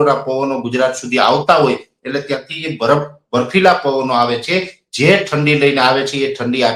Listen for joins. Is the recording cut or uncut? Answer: uncut